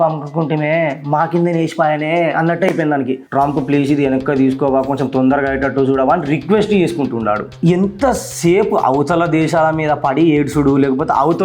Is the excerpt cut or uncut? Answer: cut